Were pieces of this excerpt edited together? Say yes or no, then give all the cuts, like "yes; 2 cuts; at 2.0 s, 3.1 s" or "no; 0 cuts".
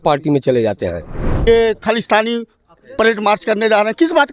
yes; 1 cut; at 1.5 s